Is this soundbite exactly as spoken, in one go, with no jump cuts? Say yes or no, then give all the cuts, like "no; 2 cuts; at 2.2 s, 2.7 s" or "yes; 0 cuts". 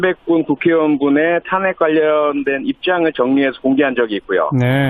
yes; 0 cuts